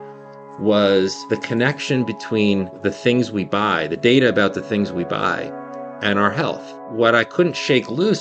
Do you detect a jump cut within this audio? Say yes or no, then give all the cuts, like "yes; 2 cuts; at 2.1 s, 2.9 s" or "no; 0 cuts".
yes; 3 cuts; at 1.2 s, 2.8 s, 6.8 s